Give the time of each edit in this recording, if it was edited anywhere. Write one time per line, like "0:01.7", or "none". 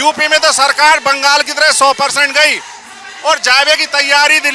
none